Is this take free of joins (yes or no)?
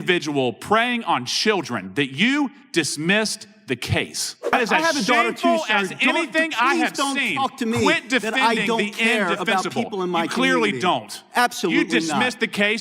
no